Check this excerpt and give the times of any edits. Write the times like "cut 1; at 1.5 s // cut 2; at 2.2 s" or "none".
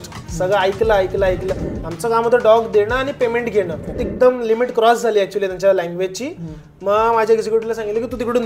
cut 1; at 1.5 s // cut 2; at 4.0 s